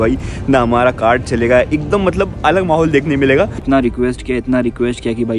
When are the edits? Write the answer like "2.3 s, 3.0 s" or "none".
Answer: 3.6 s